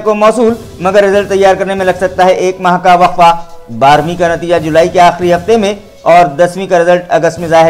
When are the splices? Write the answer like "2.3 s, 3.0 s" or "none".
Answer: none